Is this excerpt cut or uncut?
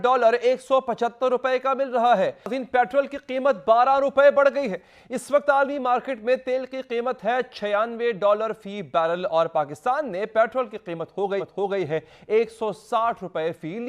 uncut